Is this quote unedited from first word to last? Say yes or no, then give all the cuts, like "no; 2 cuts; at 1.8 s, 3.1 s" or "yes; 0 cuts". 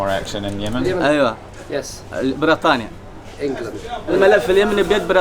yes; 0 cuts